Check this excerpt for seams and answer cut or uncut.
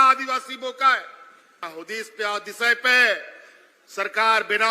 cut